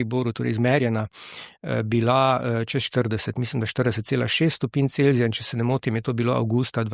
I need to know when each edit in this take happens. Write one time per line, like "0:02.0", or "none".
none